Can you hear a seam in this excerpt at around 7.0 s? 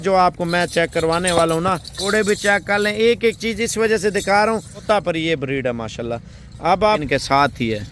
yes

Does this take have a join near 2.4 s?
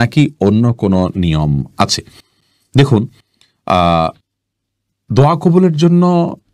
no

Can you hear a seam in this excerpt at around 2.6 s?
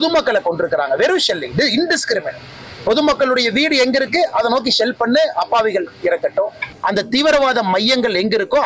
no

